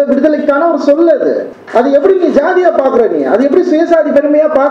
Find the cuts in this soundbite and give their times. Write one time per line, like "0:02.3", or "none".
0:01.5